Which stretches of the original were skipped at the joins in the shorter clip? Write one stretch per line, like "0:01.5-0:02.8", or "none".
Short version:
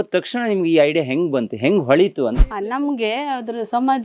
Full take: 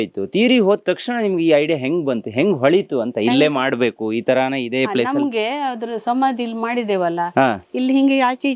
0:03.1-0:04.7